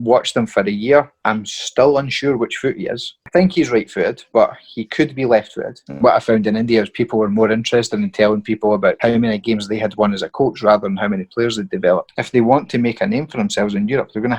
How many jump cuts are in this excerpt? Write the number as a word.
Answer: two